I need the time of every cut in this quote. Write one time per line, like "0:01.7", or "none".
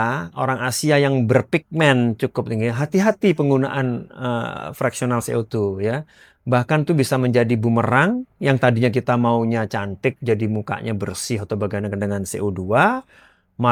none